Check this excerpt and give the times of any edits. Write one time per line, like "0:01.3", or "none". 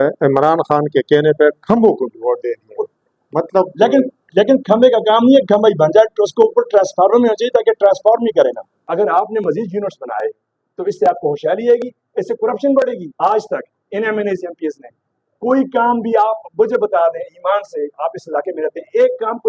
0:08.8
0:13.0